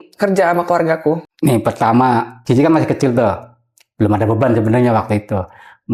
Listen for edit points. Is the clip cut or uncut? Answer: uncut